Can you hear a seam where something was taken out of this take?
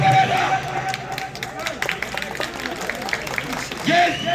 no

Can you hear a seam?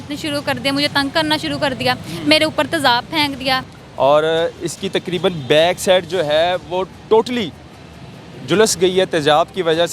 yes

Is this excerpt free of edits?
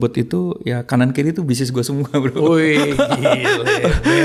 yes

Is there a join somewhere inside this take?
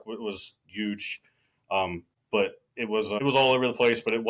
yes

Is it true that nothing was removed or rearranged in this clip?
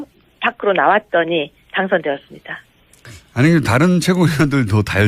no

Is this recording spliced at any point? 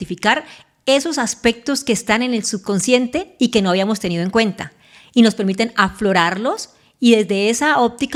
no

